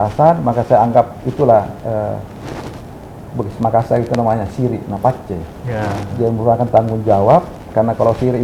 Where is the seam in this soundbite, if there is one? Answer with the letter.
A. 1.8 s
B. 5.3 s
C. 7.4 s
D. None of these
D